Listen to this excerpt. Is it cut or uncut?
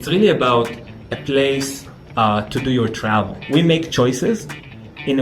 cut